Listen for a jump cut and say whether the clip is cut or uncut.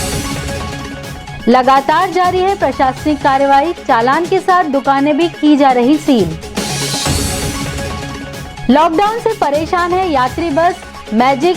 cut